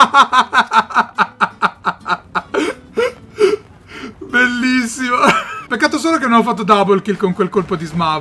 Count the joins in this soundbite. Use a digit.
0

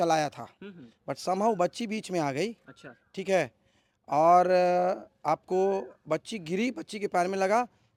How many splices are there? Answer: 0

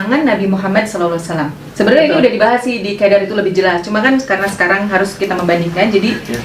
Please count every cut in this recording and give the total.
1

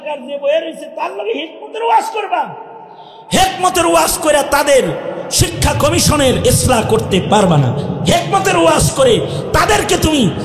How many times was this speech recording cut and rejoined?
0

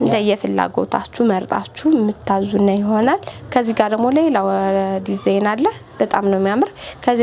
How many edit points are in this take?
1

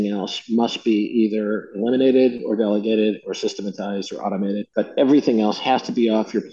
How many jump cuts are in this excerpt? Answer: 1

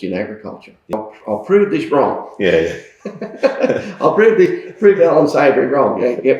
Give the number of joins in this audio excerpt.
1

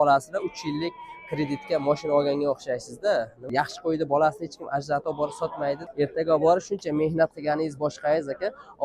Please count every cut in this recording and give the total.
2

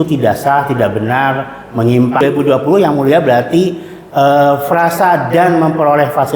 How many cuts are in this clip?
1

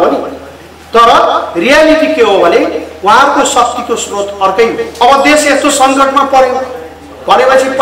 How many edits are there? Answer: 1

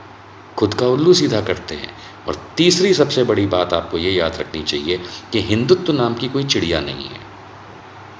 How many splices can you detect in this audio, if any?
0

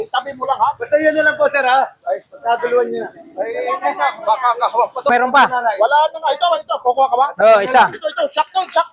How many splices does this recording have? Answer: 1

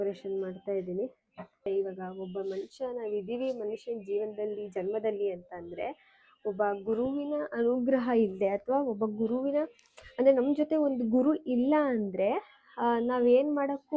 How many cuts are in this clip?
1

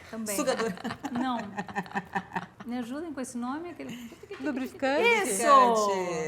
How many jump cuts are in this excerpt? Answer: 1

